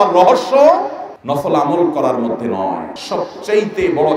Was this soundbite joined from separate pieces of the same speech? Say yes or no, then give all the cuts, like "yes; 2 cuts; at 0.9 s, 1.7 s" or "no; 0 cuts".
yes; 1 cut; at 2.9 s